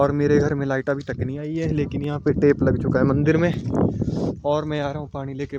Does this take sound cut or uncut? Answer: uncut